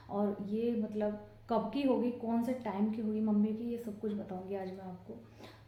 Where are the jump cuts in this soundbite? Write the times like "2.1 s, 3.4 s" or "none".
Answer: none